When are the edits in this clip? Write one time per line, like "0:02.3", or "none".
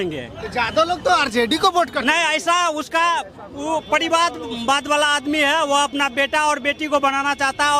none